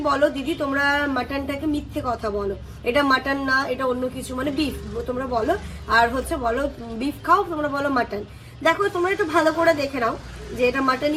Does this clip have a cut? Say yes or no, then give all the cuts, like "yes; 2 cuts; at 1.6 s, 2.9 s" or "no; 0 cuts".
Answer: no; 0 cuts